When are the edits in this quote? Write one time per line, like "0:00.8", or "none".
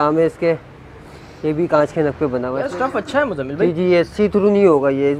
0:02.6